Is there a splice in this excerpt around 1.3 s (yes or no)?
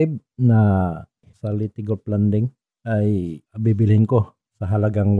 yes